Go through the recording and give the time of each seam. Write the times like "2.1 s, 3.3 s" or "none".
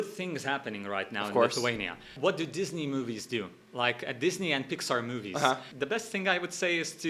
2.1 s, 5.7 s